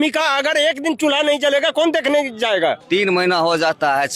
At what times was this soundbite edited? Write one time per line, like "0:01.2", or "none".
0:02.8